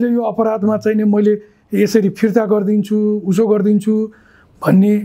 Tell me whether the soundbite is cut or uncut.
uncut